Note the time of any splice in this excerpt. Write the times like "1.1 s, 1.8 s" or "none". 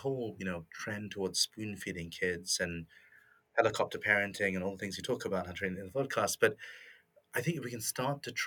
none